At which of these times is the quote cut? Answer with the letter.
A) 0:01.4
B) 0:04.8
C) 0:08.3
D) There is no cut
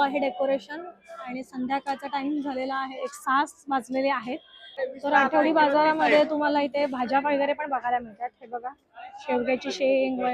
B